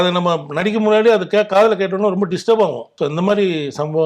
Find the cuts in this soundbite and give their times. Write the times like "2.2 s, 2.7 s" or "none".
2.9 s